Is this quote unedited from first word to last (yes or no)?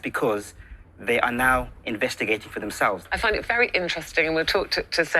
yes